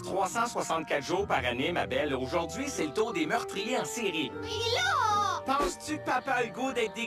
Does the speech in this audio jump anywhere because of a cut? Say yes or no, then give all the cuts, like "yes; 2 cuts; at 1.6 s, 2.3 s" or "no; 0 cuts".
yes; 1 cut; at 4.9 s